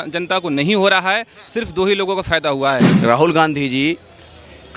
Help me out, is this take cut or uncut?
cut